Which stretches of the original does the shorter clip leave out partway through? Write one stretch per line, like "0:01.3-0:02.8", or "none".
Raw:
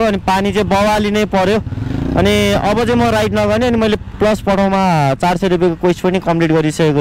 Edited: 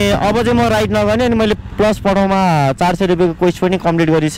none